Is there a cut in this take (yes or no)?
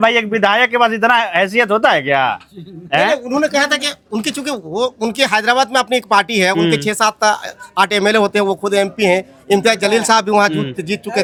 no